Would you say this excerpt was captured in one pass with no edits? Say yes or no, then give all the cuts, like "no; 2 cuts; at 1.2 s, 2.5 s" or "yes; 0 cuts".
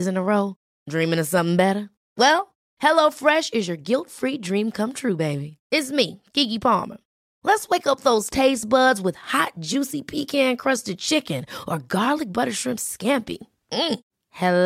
yes; 0 cuts